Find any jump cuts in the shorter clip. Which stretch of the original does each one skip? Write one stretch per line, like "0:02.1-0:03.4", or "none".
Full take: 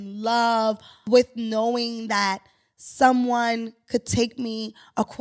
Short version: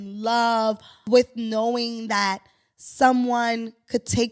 none